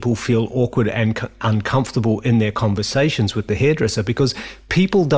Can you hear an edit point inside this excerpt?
no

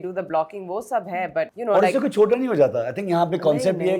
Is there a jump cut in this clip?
yes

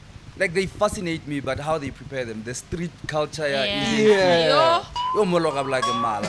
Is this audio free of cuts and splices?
yes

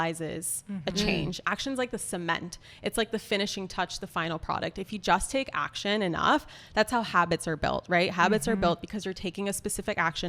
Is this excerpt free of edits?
no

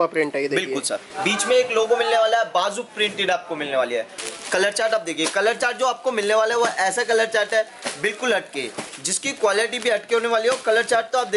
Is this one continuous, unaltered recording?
no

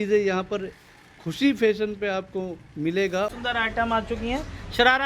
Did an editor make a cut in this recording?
yes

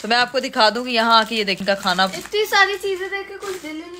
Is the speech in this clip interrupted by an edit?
yes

